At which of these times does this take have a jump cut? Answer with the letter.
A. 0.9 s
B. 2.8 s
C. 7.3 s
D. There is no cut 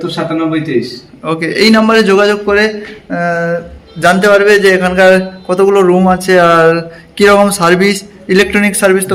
D